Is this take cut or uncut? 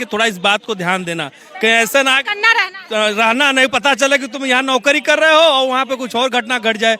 uncut